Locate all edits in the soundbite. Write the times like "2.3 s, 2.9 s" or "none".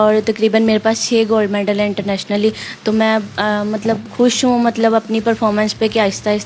none